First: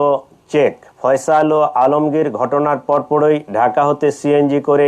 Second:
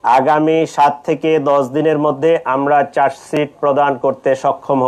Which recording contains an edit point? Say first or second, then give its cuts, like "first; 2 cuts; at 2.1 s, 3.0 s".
first; 1 cut; at 0.9 s